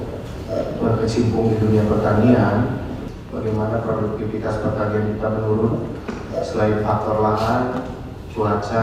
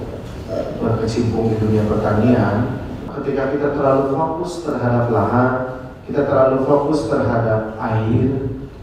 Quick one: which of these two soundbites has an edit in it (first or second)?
second